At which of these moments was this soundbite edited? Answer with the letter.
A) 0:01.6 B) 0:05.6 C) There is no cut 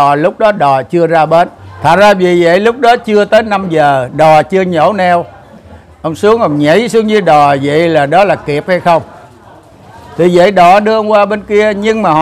A